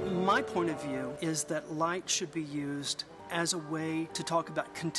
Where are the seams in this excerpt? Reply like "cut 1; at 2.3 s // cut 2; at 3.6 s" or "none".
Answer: cut 1; at 1.1 s // cut 2; at 3.1 s // cut 3; at 4.2 s